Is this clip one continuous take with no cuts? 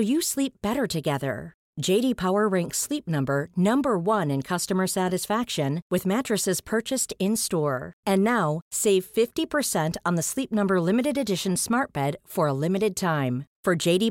yes; 0 cuts

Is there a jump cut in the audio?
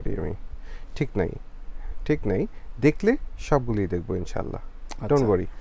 no; 0 cuts

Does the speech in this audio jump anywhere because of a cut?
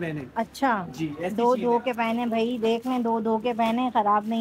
no; 0 cuts

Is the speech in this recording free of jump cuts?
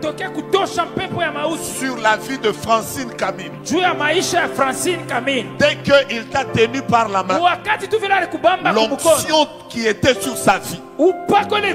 yes; 0 cuts

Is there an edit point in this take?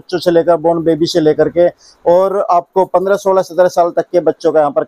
no; 0 cuts

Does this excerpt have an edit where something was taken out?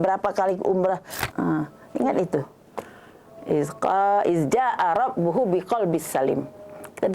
yes; 1 cut; at 1.2 s

